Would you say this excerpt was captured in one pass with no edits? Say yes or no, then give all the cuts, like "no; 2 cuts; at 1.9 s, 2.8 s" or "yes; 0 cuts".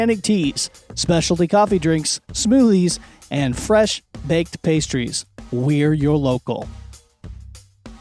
no; 1 cut; at 6.7 s